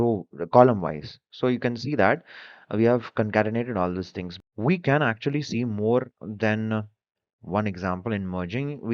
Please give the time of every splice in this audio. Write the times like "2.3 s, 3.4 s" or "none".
4.2 s